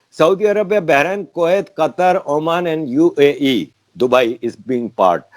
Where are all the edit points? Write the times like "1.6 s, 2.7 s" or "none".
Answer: none